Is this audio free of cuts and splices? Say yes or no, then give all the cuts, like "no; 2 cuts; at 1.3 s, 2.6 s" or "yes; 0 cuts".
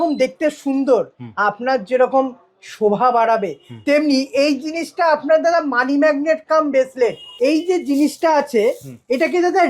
no; 1 cut; at 7.2 s